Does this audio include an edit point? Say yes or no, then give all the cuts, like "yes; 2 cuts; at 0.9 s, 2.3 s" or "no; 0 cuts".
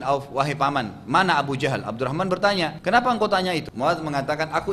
yes; 2 cuts; at 2.8 s, 3.7 s